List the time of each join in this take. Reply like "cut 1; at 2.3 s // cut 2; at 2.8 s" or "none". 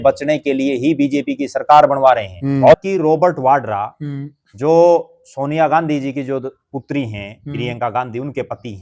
cut 1; at 2.8 s